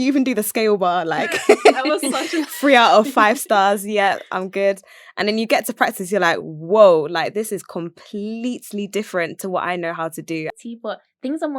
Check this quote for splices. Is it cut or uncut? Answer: cut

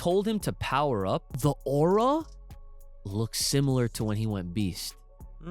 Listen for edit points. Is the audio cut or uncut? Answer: cut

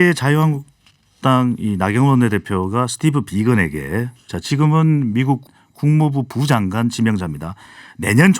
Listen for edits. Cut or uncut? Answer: cut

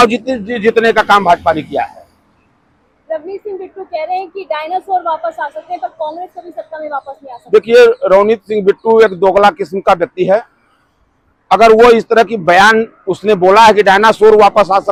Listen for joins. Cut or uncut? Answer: uncut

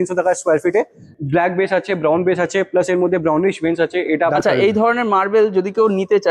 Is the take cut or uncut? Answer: cut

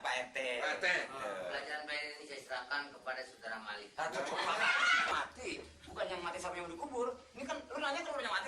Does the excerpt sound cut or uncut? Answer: cut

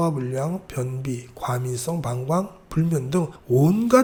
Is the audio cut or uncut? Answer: uncut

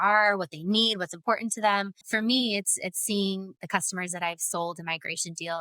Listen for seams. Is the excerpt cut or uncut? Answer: cut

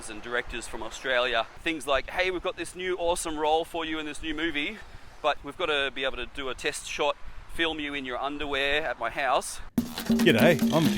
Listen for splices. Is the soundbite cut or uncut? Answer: cut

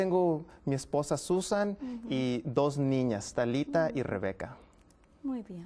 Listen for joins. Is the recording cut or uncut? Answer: uncut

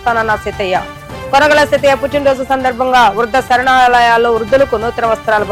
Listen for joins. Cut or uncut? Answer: uncut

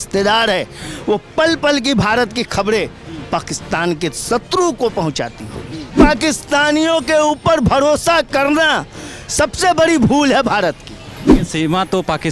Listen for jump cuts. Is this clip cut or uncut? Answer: cut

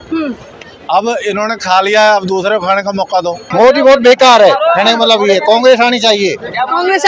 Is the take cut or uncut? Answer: cut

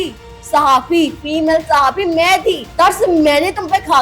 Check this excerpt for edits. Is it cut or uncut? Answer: cut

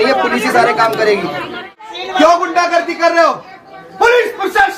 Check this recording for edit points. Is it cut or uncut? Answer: cut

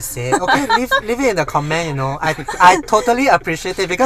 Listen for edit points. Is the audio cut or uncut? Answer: uncut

